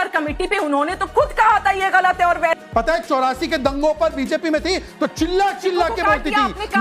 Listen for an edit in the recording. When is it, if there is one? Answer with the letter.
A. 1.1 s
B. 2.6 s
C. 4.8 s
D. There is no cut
B